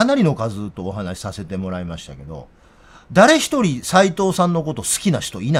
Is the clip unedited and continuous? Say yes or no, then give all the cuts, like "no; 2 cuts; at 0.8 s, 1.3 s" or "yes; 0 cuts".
yes; 0 cuts